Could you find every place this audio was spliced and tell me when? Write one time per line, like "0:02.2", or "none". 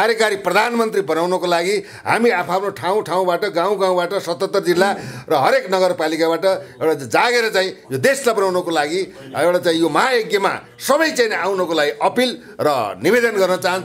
none